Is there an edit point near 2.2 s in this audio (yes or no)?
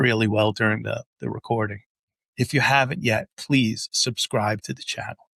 yes